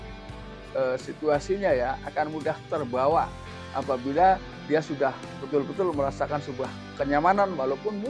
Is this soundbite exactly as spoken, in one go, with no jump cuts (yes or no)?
yes